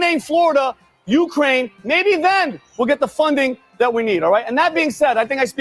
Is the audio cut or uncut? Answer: cut